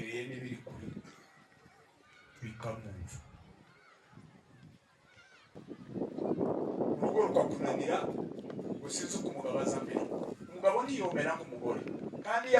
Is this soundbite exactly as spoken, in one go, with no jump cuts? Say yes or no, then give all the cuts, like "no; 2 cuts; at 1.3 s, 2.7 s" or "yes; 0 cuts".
no; 1 cut; at 5.7 s